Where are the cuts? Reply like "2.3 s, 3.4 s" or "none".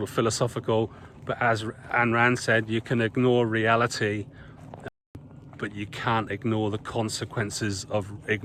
none

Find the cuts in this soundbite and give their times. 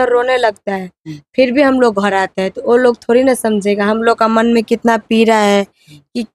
none

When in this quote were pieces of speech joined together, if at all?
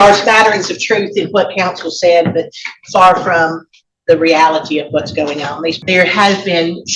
5.8 s

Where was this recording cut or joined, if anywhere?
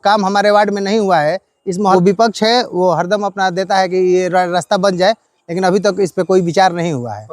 1.9 s

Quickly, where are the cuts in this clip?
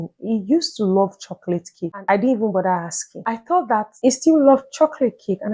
3.2 s

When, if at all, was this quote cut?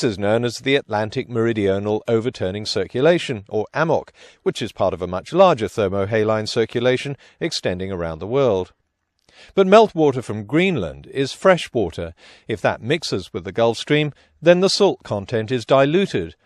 3.9 s

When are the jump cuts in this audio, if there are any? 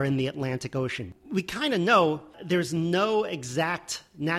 1.0 s, 2.4 s

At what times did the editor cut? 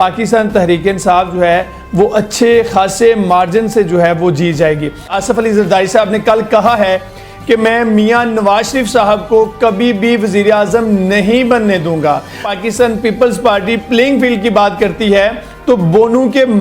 5.1 s, 12.5 s

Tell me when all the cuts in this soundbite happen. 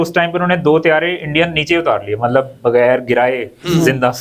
none

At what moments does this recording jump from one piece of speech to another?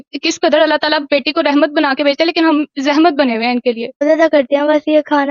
4.4 s

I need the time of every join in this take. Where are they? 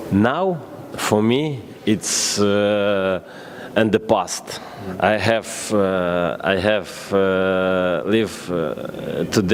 none

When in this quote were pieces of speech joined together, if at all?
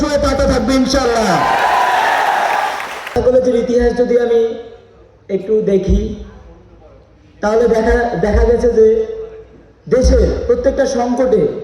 3.2 s

